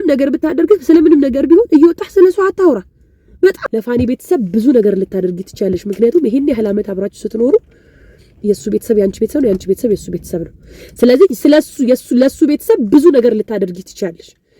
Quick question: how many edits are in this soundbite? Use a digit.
1